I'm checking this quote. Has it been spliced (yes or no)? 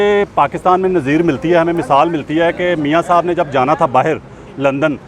no